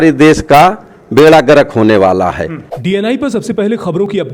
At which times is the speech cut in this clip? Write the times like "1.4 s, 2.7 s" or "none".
2.7 s